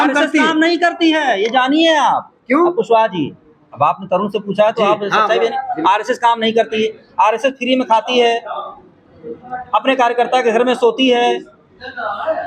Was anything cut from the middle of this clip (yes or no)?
no